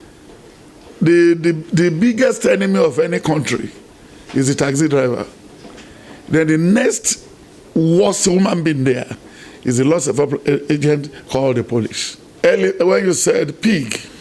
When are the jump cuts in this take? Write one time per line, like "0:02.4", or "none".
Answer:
0:12.3